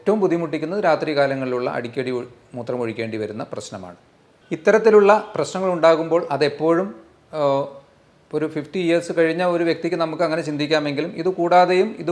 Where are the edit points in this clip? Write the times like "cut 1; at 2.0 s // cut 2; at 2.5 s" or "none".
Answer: none